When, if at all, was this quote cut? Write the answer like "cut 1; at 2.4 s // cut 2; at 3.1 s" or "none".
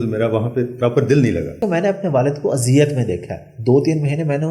cut 1; at 1.6 s